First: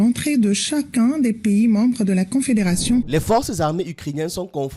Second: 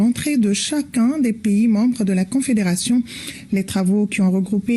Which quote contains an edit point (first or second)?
first